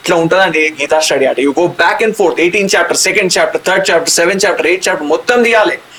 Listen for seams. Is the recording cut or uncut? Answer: uncut